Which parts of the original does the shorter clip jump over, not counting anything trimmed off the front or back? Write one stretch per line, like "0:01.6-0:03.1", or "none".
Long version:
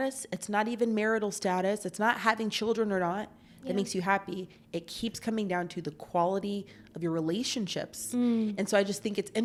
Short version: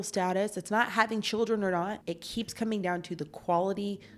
0:03.4-0:04.8